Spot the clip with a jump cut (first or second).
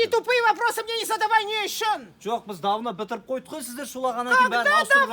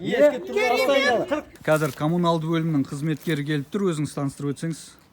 second